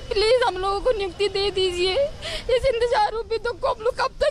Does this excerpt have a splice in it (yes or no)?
yes